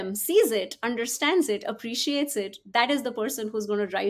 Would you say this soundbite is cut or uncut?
uncut